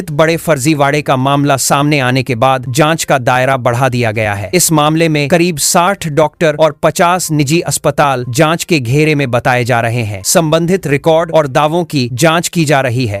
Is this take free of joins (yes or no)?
yes